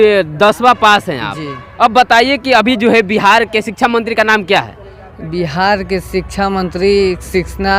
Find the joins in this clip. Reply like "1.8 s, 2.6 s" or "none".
none